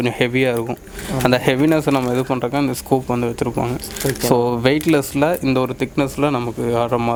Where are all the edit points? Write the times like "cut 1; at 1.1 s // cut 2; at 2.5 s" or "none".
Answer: none